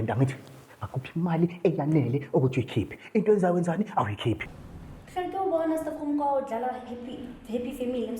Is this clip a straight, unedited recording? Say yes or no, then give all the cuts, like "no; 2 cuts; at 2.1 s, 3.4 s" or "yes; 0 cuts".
no; 1 cut; at 4.5 s